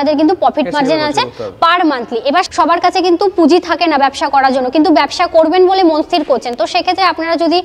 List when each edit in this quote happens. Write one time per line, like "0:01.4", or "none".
0:02.5